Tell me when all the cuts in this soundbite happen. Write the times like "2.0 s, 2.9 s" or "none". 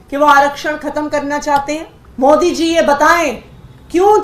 2.0 s